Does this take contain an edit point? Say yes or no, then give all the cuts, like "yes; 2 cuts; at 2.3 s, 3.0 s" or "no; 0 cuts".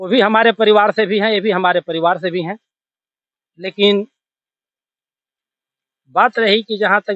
no; 0 cuts